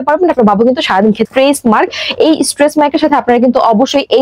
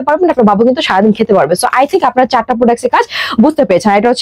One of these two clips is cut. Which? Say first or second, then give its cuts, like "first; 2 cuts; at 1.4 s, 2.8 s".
first; 1 cut; at 1.2 s